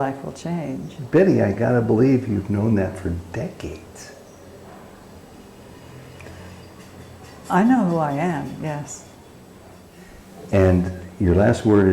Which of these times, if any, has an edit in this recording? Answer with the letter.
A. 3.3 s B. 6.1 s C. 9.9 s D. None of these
C